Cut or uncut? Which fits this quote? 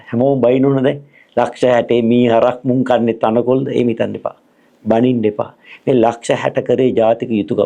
uncut